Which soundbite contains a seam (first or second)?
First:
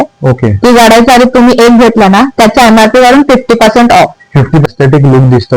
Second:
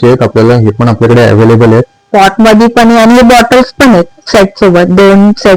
first